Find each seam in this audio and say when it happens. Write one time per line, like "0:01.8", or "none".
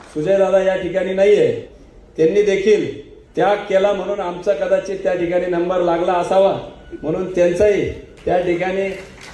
0:01.7